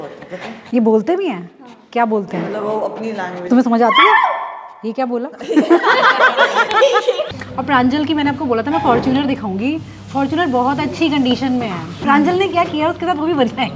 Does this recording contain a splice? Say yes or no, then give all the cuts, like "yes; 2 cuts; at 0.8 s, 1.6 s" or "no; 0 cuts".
yes; 2 cuts; at 7.2 s, 11.9 s